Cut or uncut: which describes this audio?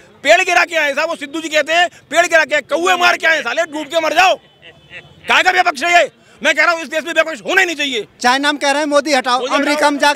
cut